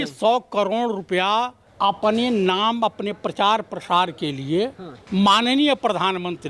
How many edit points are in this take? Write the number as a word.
two